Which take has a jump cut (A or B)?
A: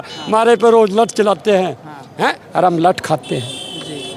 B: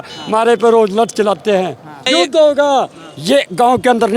B